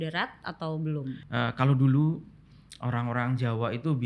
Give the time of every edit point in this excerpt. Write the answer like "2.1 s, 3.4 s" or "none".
1.2 s